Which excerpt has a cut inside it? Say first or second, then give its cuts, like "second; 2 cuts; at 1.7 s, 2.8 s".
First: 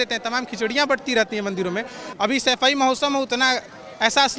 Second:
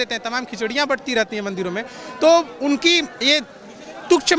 first; 1 cut; at 2.0 s